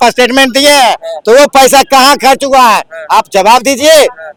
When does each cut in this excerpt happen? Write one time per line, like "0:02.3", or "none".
none